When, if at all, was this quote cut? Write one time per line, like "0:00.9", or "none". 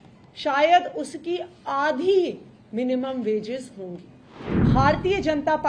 0:04.7